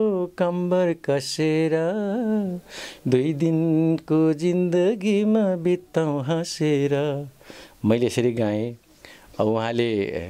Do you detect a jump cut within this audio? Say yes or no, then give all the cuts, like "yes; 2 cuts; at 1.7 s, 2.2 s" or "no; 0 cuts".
no; 0 cuts